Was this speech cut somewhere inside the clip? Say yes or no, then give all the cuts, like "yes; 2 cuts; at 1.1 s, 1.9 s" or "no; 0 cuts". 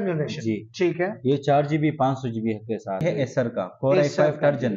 yes; 1 cut; at 3.0 s